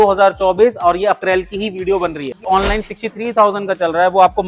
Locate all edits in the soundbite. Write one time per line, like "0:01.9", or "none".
0:02.5